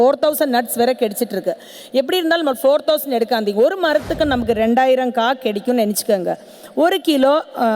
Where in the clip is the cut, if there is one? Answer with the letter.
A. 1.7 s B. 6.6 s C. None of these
C